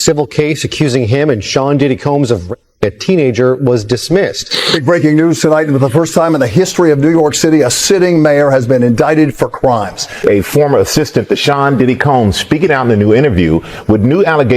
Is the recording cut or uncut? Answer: cut